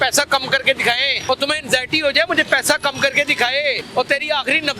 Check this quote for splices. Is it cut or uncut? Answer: cut